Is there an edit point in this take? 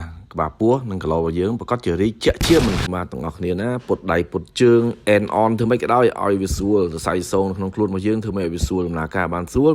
yes; 1 cut; at 2.8 s

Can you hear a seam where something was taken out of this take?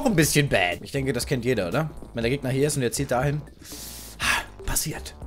no; 0 cuts

